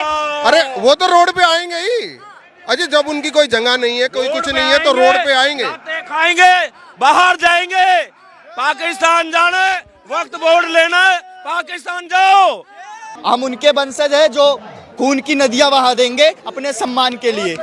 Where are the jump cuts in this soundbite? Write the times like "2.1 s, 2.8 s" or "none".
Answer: 13.2 s